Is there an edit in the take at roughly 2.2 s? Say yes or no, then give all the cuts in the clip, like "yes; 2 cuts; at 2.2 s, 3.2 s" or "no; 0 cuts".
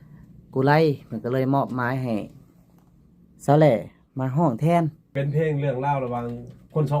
no; 1 cut; at 5.1 s